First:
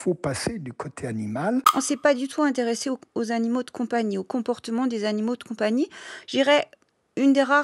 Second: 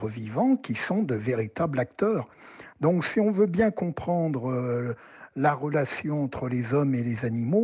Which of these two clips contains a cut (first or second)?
first